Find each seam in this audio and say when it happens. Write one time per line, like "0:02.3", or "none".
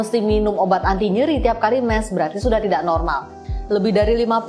0:03.4